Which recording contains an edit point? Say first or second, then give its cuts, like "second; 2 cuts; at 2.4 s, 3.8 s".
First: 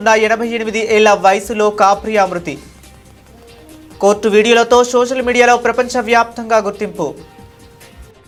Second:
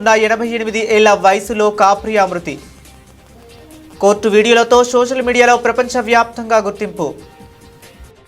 second; 3 cuts; at 2.7 s, 4.0 s, 7.2 s